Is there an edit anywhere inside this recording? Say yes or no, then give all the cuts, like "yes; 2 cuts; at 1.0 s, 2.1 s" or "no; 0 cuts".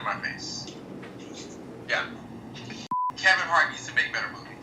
yes; 1 cut; at 2.9 s